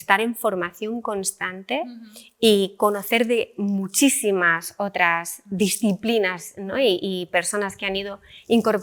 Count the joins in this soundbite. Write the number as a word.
zero